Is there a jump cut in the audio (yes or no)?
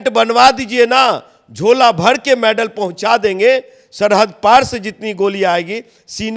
no